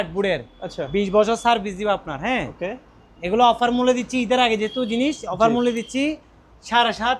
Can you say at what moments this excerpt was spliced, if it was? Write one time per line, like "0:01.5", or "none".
none